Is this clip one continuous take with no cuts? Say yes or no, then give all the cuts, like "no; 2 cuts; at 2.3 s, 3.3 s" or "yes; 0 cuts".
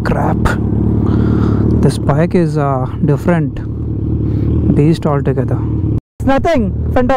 no; 1 cut; at 6.1 s